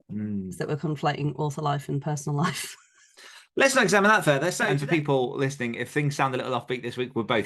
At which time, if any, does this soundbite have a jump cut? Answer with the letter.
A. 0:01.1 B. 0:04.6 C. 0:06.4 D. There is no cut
B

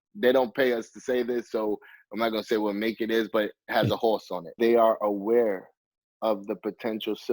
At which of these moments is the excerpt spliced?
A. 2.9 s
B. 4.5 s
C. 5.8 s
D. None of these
B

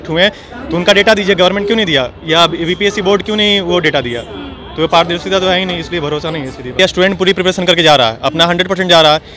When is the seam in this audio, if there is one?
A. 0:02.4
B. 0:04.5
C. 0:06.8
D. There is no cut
C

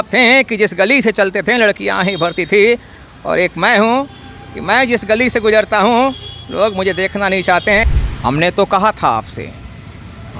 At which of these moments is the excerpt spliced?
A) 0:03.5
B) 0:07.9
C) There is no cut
B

